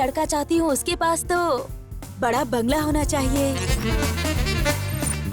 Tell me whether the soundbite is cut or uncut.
uncut